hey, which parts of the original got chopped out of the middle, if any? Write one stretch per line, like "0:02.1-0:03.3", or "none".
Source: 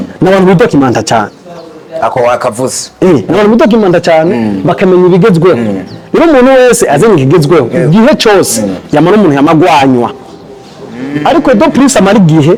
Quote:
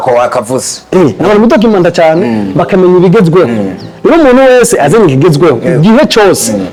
none